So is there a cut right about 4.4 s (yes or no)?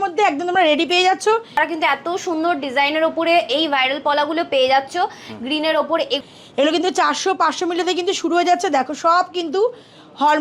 no